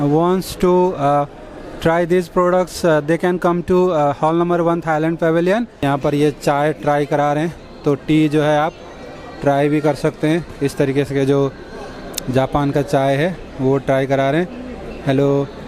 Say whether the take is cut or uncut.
cut